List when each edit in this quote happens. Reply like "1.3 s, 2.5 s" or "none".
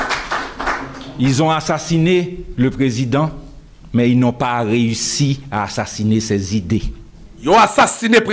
none